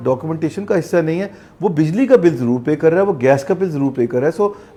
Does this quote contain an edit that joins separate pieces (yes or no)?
no